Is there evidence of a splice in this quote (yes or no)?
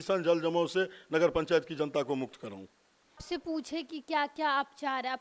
yes